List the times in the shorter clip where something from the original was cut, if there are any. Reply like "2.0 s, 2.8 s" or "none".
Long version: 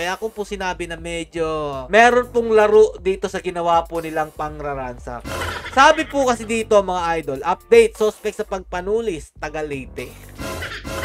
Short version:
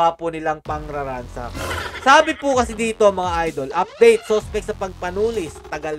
none